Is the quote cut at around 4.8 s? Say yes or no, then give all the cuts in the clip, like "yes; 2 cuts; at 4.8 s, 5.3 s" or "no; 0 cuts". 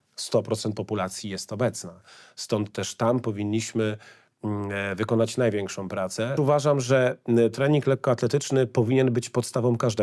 no; 1 cut; at 6.3 s